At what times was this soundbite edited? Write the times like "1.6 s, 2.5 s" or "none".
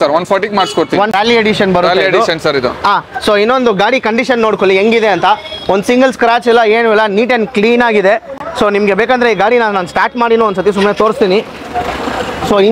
1.1 s

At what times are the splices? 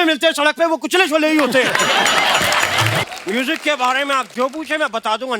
3.0 s

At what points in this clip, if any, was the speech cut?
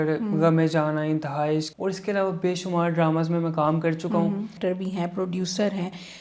1.7 s, 4.5 s

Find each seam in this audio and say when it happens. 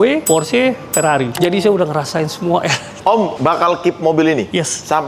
1.4 s, 2.8 s

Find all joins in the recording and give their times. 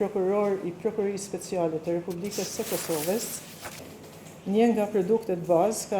3.9 s

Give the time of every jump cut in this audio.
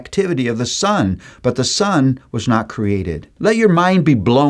3.2 s

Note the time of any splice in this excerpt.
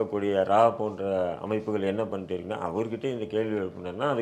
none

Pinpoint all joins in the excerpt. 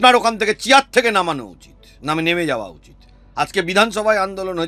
none

